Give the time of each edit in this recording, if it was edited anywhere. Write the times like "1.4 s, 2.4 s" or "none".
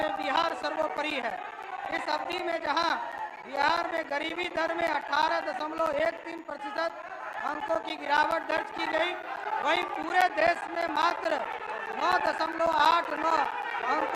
none